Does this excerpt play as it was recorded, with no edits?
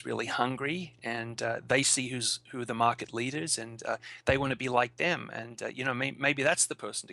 yes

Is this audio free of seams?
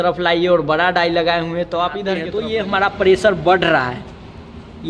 no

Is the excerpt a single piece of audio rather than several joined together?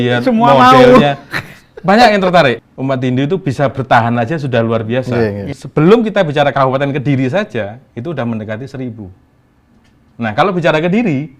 no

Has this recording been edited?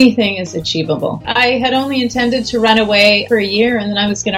yes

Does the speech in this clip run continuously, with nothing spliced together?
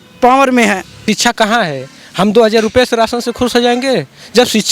no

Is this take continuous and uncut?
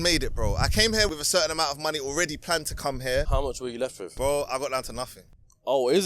no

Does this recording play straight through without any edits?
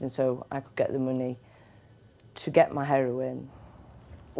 yes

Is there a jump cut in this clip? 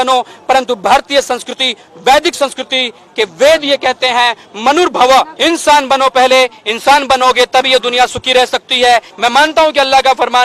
yes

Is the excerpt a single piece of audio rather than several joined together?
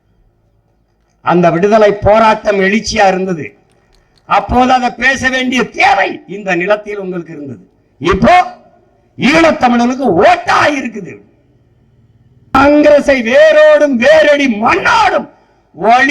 no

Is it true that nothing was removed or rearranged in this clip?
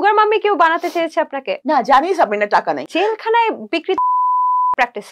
no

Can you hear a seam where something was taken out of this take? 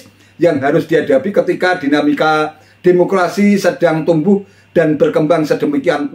no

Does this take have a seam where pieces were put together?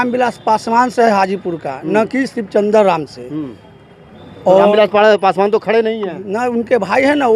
no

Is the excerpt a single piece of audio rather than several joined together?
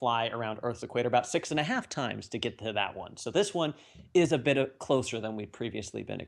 no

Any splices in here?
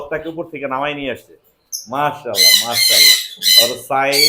no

